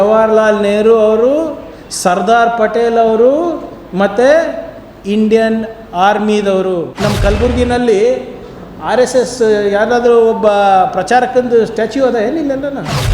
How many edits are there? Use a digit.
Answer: 1